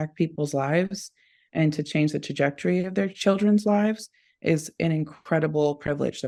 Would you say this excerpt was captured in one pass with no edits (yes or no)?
yes